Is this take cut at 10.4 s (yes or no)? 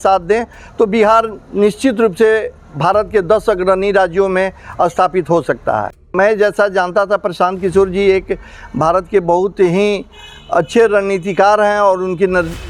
no